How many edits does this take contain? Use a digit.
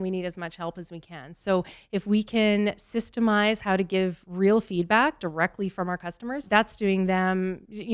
1